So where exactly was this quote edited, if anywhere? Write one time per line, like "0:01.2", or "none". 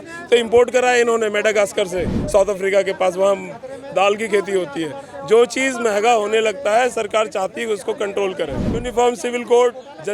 0:08.7